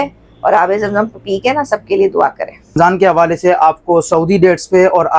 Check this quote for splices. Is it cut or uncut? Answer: cut